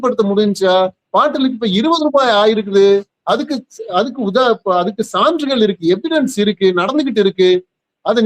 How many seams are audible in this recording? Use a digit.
0